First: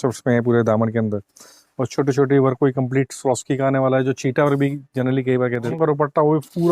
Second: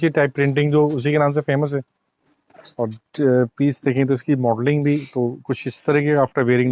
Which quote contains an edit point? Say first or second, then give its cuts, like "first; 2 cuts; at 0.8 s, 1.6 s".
first; 1 cut; at 5.7 s